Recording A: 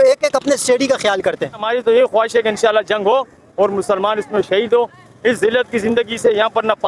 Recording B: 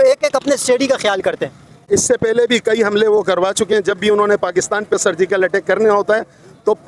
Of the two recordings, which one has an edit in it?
A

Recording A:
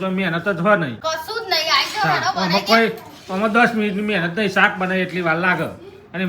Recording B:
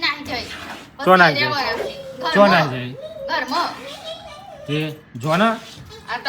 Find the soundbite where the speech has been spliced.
A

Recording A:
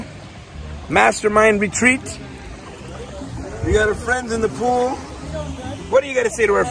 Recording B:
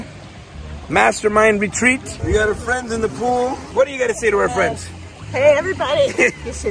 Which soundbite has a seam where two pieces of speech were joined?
B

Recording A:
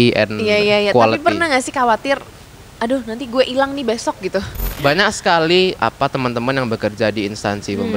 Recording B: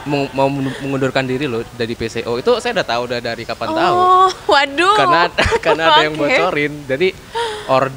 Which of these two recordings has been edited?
A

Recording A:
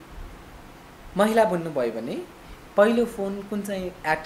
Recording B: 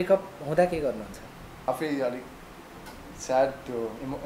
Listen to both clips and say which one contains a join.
B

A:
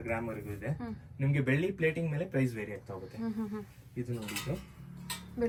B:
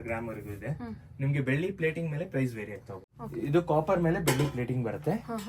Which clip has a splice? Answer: B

